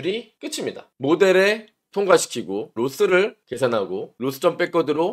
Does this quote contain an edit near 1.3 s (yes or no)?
no